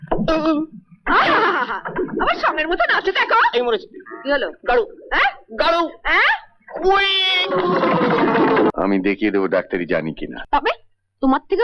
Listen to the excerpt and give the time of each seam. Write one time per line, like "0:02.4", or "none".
0:08.7